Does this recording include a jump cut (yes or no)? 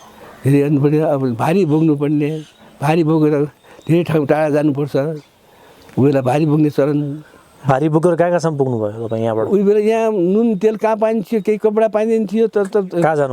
no